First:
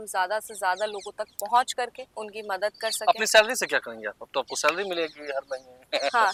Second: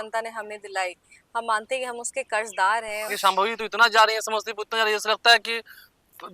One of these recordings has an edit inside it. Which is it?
second; 1 cut; at 3.1 s

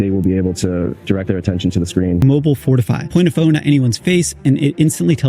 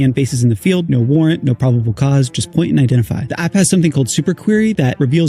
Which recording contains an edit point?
first; 1 cut; at 2.2 s

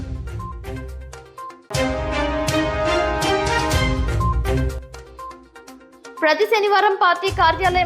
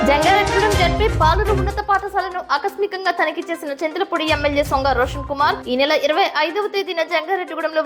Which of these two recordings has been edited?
first; 2 cuts; at 1.6 s, 5.5 s

